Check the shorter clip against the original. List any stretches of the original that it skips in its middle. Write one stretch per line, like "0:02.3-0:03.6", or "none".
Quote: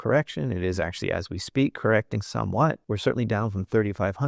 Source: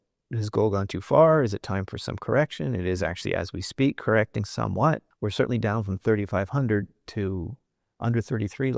0:05.1-0:05.2